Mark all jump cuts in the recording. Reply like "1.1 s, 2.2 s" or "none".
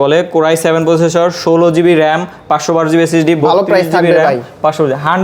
none